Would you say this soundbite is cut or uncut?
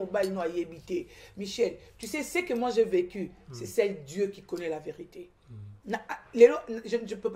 cut